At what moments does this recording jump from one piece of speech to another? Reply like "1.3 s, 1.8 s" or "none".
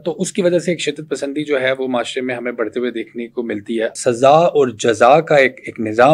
3.9 s